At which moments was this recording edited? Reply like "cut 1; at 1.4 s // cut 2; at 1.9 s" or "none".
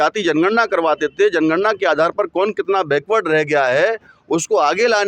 none